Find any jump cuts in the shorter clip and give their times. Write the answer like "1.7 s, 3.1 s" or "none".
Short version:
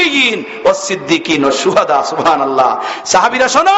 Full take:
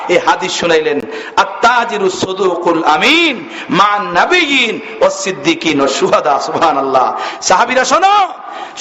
none